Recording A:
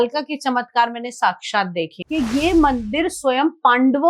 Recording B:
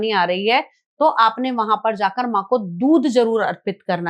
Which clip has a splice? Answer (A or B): A